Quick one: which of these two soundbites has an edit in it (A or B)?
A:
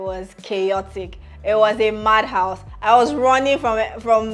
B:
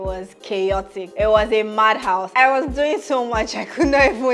B